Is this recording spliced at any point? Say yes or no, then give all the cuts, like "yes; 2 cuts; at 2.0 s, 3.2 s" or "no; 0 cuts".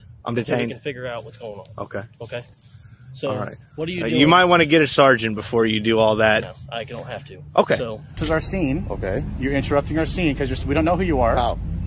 yes; 1 cut; at 8.1 s